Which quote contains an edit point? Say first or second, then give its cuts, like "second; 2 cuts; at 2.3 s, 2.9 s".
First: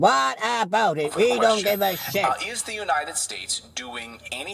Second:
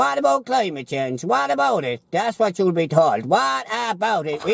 first; 1 cut; at 2.2 s